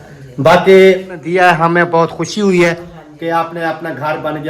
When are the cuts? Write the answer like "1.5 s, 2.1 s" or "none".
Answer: 1.2 s